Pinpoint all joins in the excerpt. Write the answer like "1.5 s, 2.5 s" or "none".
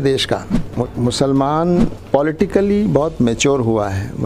0.8 s, 2.0 s